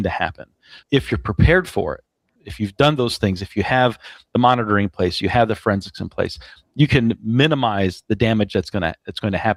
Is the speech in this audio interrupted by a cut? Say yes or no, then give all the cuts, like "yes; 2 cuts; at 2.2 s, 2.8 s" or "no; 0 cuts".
no; 0 cuts